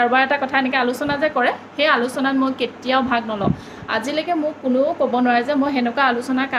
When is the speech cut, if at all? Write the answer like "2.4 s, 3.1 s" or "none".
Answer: none